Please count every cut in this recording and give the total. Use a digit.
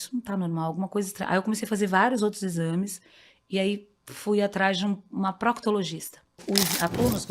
1